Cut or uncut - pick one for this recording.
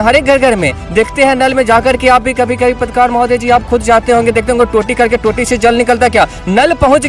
uncut